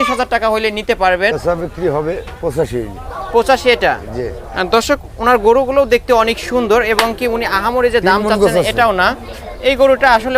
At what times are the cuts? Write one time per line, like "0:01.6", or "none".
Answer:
0:01.3